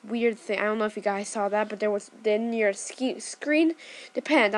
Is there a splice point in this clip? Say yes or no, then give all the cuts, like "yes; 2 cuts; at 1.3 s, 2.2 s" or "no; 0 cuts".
no; 0 cuts